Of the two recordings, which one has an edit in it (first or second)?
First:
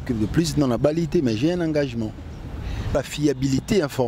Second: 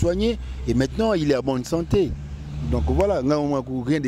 first